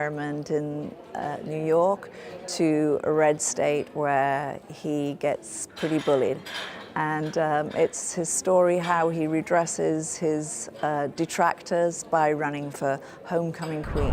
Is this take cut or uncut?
cut